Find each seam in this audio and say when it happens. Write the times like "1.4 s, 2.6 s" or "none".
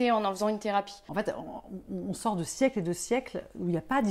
1.0 s